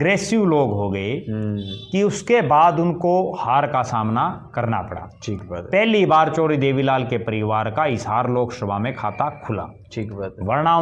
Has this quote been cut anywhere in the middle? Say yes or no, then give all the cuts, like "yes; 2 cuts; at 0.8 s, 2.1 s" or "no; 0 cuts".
no; 0 cuts